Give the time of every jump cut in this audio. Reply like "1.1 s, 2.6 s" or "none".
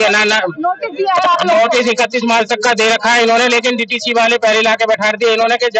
none